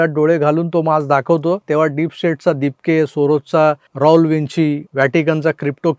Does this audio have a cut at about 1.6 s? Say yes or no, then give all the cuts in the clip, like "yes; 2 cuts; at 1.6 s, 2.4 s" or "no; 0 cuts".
yes; 3 cuts; at 1.6 s, 3.9 s, 4.9 s